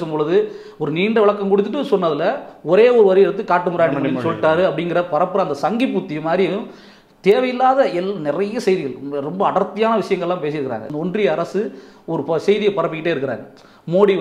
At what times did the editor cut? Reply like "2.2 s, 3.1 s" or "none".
10.9 s